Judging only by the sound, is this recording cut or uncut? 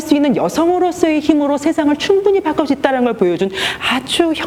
uncut